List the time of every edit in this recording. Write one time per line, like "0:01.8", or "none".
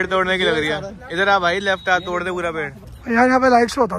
0:02.9